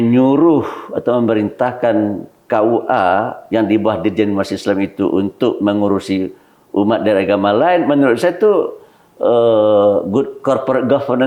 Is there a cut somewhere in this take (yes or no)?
no